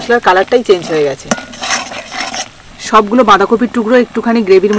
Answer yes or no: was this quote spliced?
yes